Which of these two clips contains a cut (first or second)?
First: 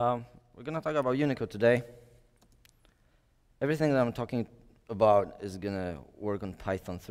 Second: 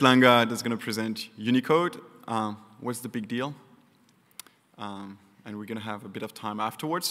first